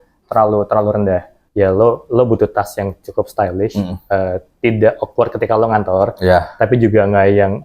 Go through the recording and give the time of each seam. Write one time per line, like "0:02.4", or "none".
0:01.5

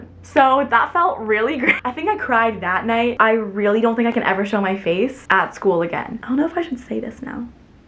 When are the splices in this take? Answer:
0:01.8
0:03.1
0:06.1

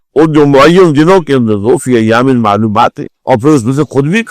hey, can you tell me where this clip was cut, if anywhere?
0:03.1

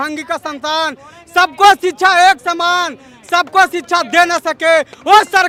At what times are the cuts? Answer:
none

